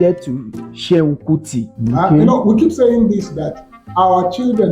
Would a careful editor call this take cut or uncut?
cut